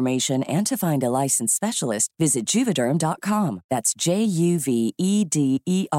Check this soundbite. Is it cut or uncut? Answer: uncut